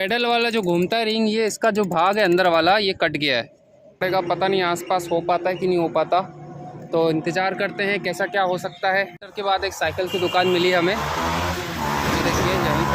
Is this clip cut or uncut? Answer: cut